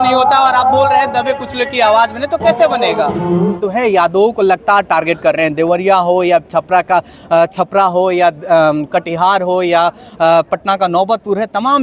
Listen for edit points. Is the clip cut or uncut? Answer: cut